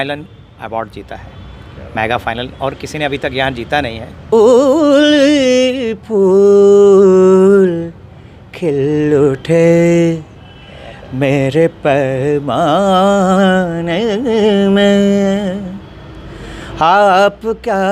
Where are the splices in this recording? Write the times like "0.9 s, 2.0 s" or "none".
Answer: 4.3 s